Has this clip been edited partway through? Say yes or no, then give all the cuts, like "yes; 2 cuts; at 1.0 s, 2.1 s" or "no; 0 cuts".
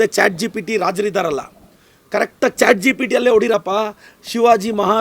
no; 0 cuts